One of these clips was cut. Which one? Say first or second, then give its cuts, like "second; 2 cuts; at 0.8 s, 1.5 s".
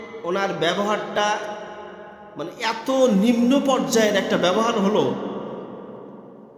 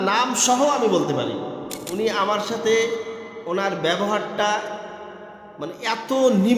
second; 1 cut; at 1.8 s